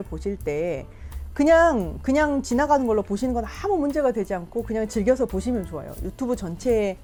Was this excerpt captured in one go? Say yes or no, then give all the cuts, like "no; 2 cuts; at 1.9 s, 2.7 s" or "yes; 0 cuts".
yes; 0 cuts